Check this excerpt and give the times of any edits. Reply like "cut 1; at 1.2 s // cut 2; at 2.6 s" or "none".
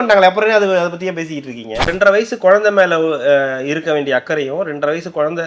cut 1; at 1.9 s